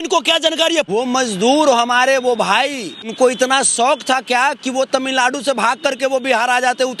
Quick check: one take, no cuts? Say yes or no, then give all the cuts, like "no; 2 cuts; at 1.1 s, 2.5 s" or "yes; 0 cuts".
no; 2 cuts; at 0.9 s, 3.1 s